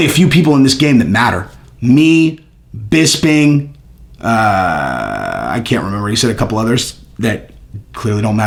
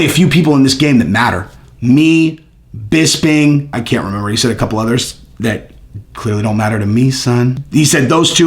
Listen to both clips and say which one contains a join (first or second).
second